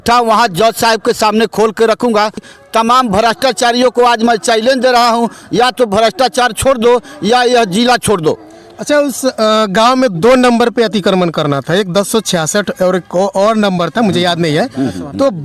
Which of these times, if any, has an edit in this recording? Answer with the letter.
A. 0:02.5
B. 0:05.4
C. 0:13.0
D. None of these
A